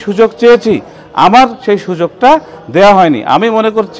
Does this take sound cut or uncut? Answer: uncut